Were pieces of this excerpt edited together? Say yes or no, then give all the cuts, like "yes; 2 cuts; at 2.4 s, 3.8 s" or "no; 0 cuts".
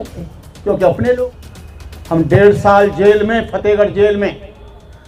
yes; 1 cut; at 1.2 s